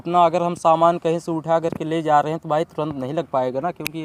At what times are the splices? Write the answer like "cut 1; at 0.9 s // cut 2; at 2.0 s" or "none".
none